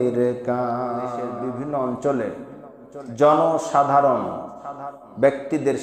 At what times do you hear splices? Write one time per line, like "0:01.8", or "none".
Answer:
0:01.3